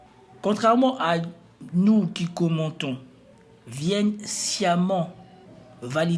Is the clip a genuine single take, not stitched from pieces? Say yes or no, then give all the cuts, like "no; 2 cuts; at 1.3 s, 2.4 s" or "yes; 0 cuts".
yes; 0 cuts